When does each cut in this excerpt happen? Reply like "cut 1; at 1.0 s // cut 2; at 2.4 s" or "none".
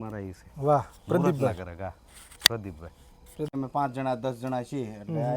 cut 1; at 3.5 s